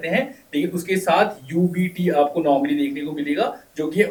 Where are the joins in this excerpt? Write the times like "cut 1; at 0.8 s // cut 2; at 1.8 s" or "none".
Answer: none